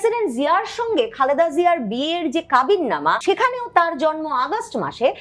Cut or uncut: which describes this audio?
cut